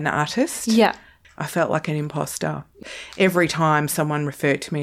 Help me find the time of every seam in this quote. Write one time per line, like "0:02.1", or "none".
0:01.2
0:02.7